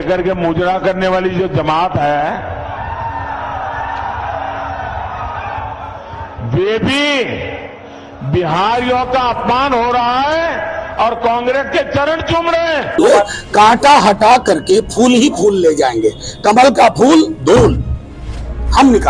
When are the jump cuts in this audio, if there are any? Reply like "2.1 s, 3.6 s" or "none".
12.9 s